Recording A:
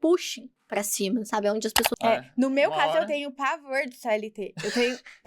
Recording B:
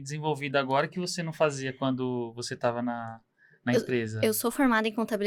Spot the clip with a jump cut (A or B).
A